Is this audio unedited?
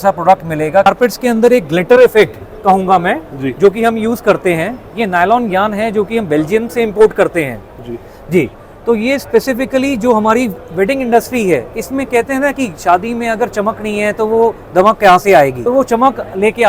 no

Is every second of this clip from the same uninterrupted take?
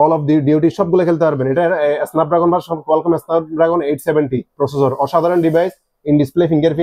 yes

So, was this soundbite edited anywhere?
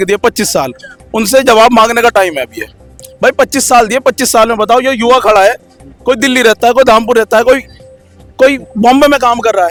no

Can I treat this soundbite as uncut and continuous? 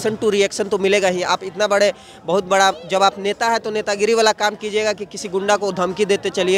yes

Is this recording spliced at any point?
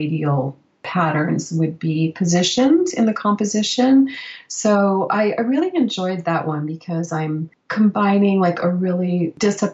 yes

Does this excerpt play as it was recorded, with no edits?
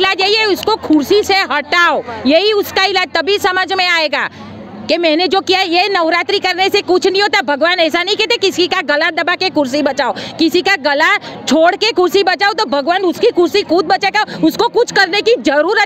yes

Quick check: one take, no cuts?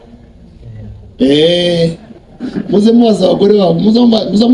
yes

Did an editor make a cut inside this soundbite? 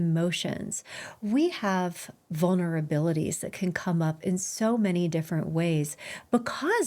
no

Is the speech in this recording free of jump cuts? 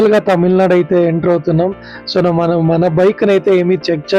yes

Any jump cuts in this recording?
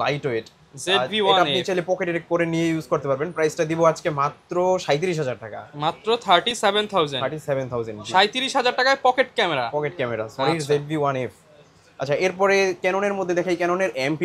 no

